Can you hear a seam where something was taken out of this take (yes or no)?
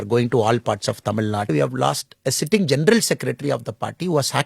yes